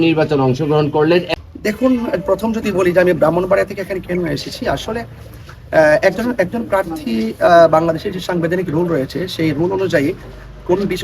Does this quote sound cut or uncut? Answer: cut